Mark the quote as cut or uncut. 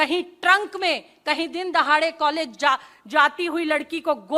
uncut